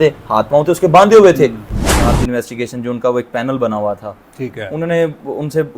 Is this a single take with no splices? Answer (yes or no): no